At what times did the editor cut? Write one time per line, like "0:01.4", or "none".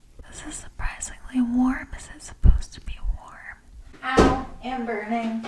0:03.9